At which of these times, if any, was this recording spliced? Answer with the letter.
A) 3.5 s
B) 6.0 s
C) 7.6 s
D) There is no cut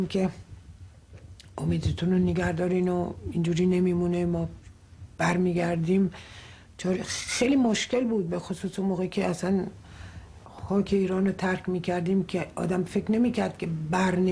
B